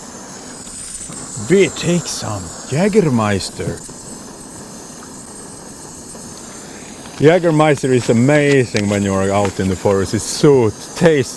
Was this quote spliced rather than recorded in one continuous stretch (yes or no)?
no